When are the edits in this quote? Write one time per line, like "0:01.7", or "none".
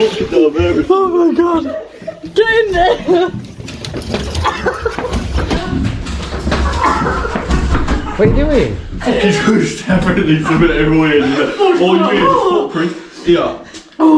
0:05.6